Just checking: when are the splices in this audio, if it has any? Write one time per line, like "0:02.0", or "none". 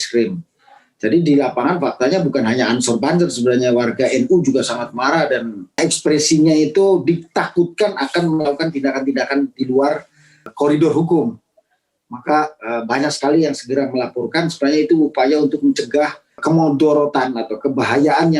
0:05.8
0:10.5
0:16.4